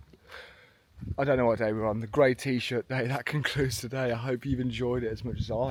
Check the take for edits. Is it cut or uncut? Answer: uncut